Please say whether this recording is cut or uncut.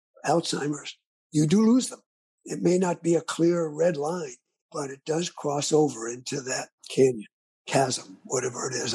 uncut